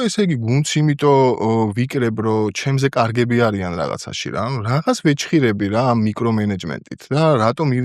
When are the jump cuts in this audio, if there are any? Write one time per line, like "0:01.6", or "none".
none